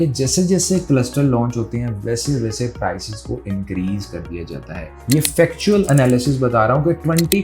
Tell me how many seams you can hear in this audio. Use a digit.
1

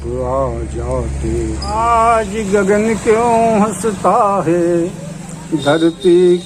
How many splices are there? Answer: 1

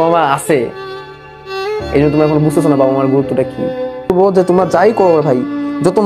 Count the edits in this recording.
1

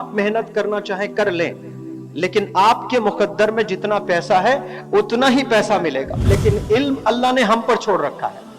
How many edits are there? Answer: 1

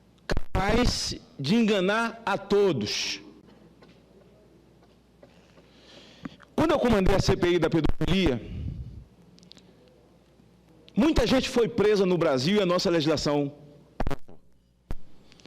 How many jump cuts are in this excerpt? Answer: 1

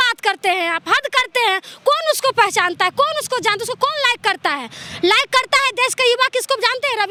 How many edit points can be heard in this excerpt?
0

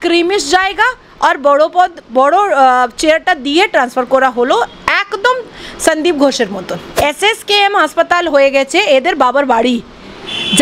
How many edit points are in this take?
1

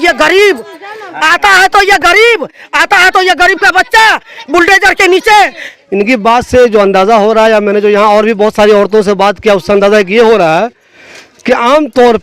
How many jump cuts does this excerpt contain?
1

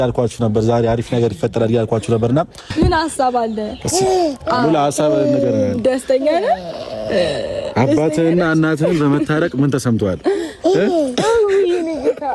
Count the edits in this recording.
1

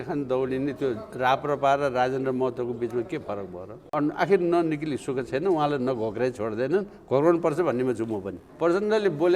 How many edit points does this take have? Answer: 2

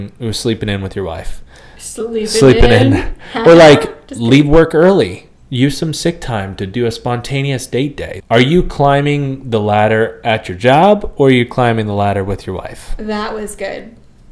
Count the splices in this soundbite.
1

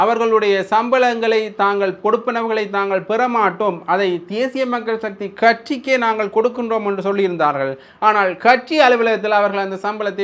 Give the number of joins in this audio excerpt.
0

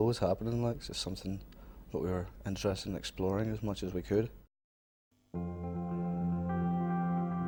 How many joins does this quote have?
0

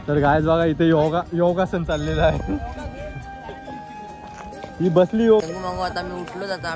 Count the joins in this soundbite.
1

